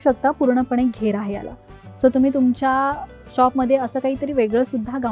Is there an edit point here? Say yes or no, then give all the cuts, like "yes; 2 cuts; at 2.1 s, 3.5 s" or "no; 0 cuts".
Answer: no; 0 cuts